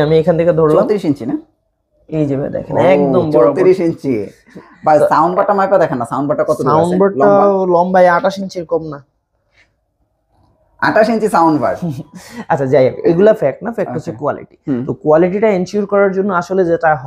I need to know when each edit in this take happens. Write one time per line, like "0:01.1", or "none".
none